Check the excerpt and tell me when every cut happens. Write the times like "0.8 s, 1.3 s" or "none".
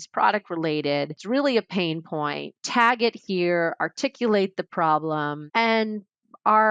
1.2 s, 2.6 s, 5.4 s